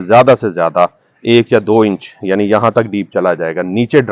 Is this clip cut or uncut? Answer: uncut